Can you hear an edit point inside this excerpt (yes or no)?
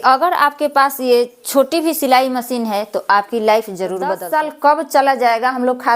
yes